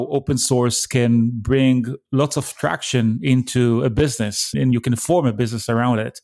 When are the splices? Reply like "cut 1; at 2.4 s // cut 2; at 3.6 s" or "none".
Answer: cut 1; at 4.5 s